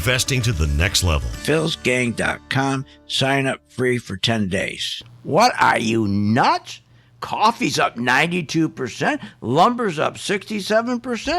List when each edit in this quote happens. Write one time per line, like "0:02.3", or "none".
0:05.0